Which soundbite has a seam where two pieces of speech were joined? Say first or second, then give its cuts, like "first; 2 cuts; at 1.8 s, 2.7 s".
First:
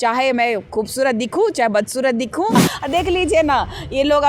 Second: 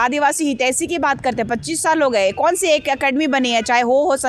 first; 1 cut; at 2.7 s